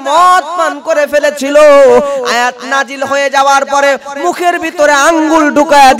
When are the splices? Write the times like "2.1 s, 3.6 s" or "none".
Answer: none